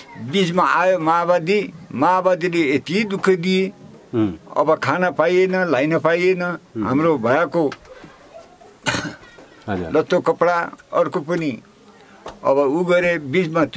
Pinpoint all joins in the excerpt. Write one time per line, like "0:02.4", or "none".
none